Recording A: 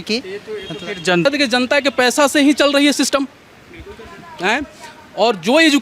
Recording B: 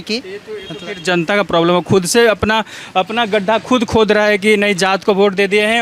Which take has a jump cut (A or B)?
A